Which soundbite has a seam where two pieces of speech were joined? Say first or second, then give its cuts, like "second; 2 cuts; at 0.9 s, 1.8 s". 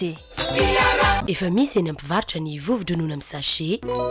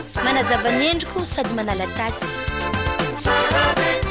first; 1 cut; at 1.2 s